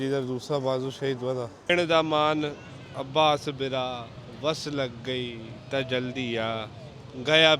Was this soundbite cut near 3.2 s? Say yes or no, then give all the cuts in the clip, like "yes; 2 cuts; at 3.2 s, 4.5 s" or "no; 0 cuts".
no; 1 cut; at 1.7 s